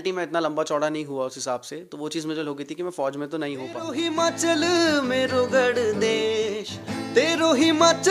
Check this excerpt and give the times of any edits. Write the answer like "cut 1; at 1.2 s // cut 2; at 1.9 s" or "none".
cut 1; at 3.9 s